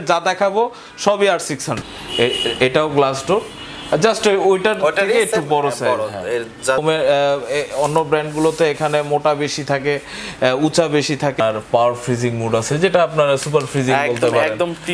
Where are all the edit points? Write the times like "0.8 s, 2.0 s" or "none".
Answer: 1.8 s, 6.8 s, 11.4 s